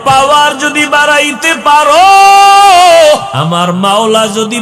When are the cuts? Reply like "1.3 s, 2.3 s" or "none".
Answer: 3.3 s